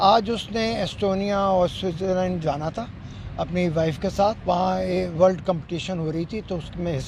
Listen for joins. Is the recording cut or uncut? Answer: cut